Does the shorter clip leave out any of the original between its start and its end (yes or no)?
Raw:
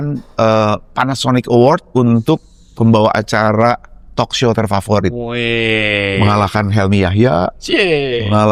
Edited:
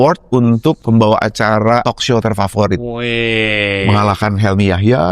yes